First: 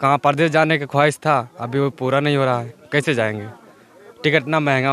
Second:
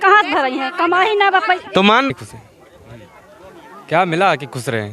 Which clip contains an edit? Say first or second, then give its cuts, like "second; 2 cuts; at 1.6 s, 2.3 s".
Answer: second; 1 cut; at 2.1 s